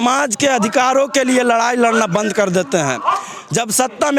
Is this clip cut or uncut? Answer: uncut